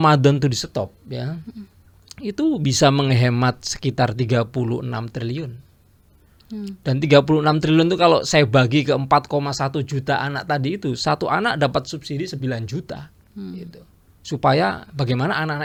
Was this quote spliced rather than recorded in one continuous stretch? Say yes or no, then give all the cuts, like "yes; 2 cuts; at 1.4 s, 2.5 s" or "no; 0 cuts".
no; 0 cuts